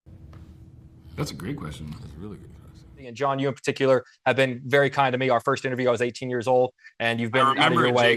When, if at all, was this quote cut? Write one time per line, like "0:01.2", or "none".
0:03.1